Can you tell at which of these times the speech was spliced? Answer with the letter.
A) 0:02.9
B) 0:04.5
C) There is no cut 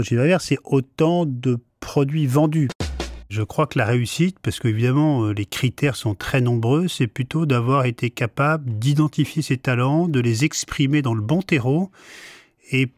A